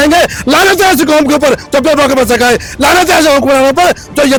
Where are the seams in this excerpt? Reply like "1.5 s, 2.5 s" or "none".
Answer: none

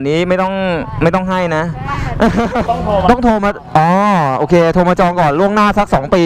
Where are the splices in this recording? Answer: 2.6 s

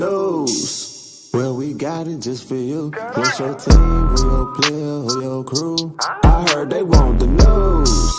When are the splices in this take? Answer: none

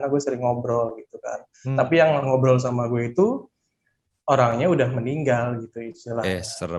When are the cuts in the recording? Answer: none

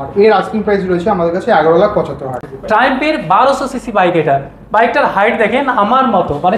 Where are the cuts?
2.4 s

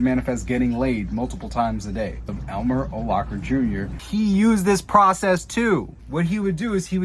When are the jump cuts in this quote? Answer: 2.3 s, 4.0 s, 6.0 s

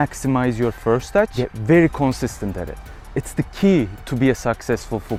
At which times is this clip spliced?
none

